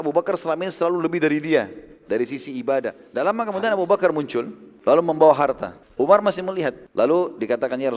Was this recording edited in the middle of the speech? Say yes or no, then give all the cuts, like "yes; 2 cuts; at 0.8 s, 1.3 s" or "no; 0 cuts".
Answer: yes; 4 cuts; at 3.0 s, 4.6 s, 5.8 s, 6.8 s